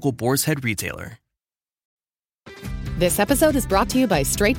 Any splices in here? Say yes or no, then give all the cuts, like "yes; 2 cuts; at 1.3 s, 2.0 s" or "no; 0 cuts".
yes; 1 cut; at 1.9 s